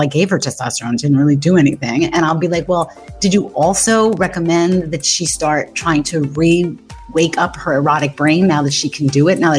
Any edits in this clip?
no; 0 cuts

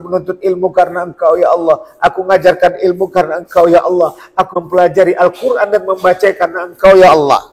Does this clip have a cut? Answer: yes; 1 cut; at 4.5 s

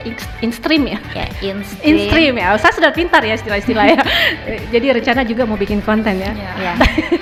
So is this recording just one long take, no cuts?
yes; 0 cuts

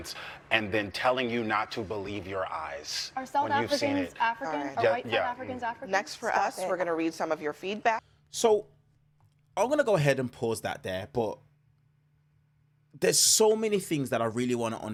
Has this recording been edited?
no; 0 cuts

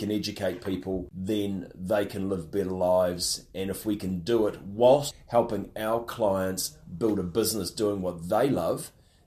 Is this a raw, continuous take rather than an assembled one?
no; 2 cuts; at 1.1 s, 5.1 s

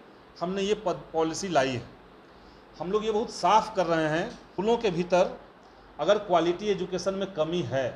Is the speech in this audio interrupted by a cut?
yes; 1 cut; at 4.4 s

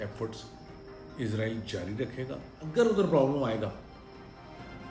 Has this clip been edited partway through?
yes; 1 cut; at 2.5 s

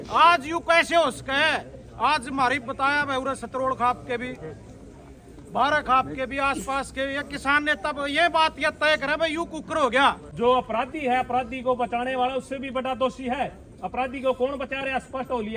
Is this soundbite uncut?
no; 1 cut; at 10.3 s

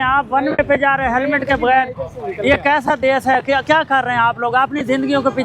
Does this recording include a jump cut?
no; 0 cuts

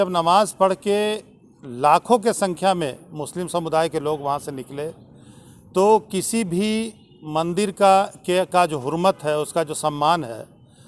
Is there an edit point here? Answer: no; 0 cuts

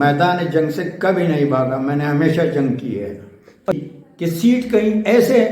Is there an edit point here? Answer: yes; 1 cut; at 3.7 s

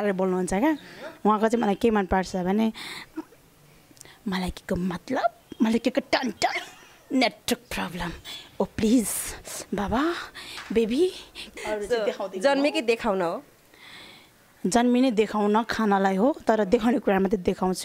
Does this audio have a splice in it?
yes; 1 cut; at 11.5 s

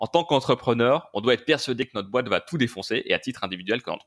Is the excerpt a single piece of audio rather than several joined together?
yes; 0 cuts

